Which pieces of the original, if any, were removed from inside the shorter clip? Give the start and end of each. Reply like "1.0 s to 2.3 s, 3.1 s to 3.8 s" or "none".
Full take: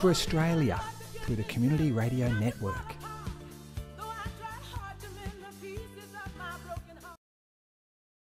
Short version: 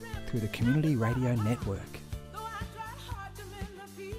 2.7 s to 3.4 s